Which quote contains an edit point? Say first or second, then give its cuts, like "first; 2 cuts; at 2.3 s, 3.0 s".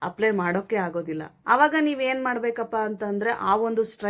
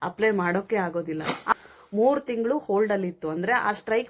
second; 1 cut; at 1.5 s